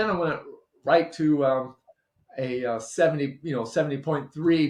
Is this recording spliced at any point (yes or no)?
no